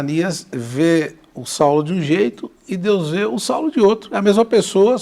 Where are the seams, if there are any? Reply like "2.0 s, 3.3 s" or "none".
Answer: none